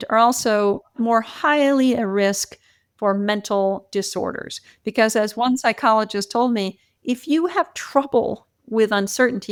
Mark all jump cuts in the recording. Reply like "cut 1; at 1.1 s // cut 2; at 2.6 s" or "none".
none